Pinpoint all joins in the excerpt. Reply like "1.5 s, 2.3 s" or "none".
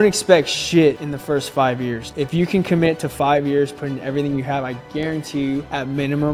none